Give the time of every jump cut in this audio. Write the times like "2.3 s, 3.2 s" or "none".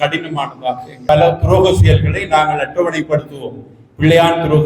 1.0 s